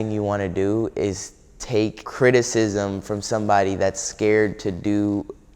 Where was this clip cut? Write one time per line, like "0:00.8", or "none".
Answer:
0:02.0

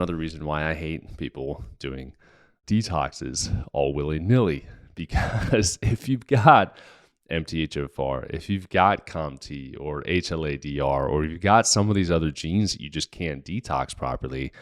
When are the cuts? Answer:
0:02.5

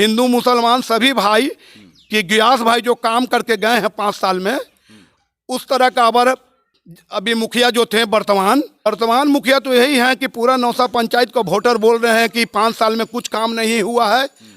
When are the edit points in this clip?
0:08.9

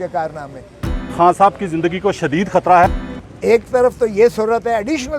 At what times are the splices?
0:01.1
0:03.0

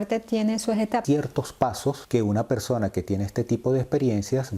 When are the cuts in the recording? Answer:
0:01.0
0:02.0

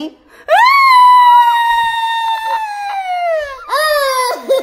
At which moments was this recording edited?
none

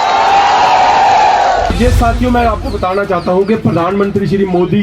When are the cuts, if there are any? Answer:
0:01.7

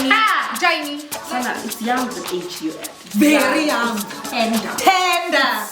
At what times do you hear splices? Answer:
0:01.1

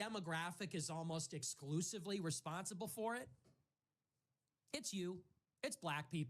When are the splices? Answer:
none

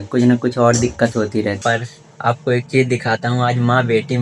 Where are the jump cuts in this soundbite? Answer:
0:01.6

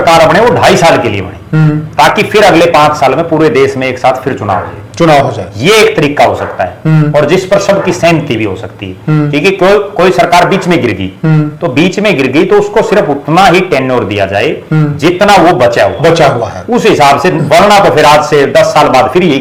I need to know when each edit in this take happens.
none

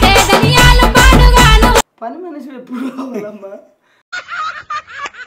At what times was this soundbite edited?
0:02.0

